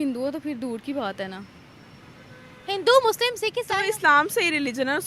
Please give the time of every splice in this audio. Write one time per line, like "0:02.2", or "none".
0:03.5